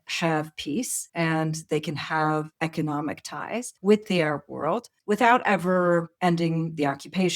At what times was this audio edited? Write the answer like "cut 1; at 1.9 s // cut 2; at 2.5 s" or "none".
cut 1; at 1.0 s // cut 2; at 2.5 s // cut 3; at 3.7 s // cut 4; at 4.9 s // cut 5; at 6.1 s

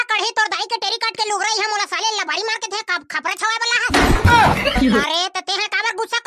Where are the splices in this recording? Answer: none

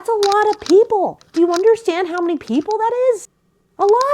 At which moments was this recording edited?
cut 1; at 1.2 s

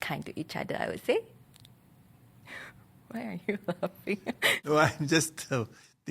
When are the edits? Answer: cut 1; at 1.4 s

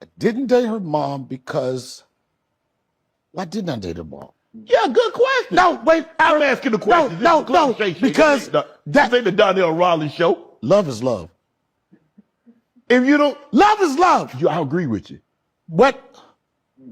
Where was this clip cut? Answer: none

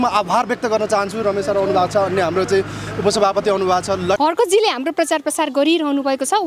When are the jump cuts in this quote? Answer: cut 1; at 4.2 s

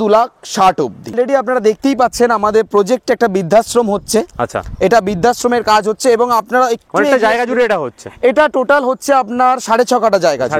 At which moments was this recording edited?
none

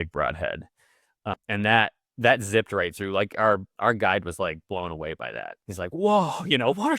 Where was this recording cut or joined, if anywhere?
cut 1; at 1.3 s // cut 2; at 5.6 s

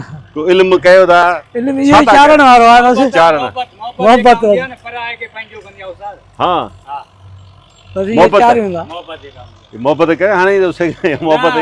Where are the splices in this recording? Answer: none

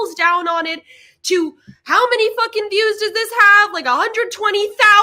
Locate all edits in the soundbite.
none

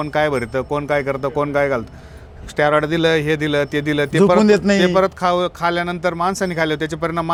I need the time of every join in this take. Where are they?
none

